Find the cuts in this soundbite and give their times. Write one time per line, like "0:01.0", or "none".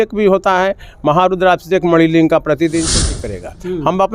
0:03.0

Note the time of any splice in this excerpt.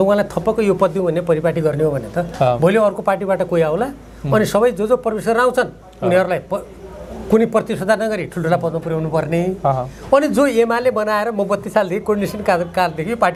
none

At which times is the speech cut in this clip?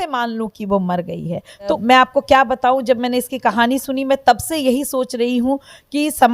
0:01.8

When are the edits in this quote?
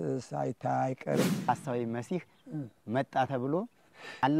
0:01.5

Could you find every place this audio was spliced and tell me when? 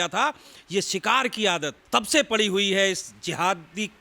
0:01.8

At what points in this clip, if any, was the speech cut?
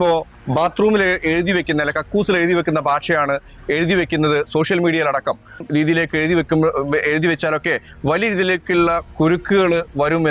0:05.6

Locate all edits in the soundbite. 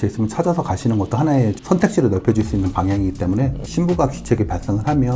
0:03.6

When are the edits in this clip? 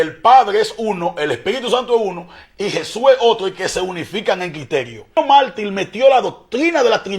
0:05.1

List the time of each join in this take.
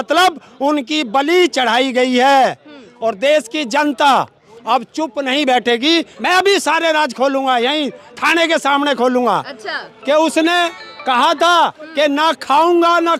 0:06.1

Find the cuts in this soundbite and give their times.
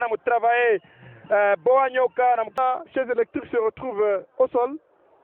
0:02.6

